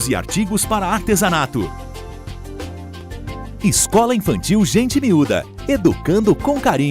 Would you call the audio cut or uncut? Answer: cut